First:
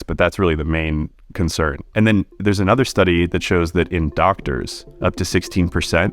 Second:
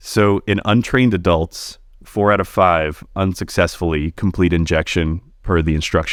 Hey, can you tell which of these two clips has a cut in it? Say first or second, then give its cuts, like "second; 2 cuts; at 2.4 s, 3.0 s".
first; 2 cuts; at 1.8 s, 4.8 s